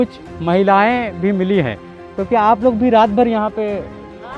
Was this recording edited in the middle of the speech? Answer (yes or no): no